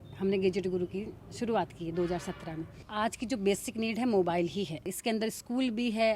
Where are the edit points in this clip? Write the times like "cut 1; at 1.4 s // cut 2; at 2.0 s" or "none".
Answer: cut 1; at 2.8 s // cut 2; at 4.9 s